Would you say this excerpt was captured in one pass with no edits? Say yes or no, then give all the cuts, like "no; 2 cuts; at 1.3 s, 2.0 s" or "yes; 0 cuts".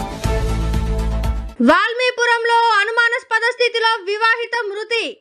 yes; 0 cuts